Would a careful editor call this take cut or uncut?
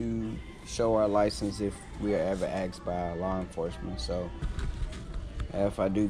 uncut